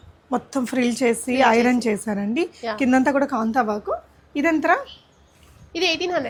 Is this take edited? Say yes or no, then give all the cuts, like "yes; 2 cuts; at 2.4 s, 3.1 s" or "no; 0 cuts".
no; 0 cuts